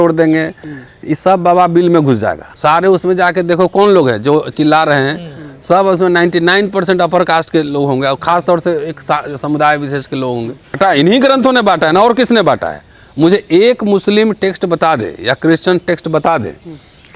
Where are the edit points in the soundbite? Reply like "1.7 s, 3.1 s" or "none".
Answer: 2.5 s, 10.8 s